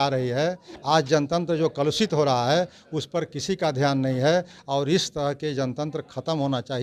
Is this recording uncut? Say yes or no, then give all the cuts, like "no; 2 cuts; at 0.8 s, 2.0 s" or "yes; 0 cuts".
yes; 0 cuts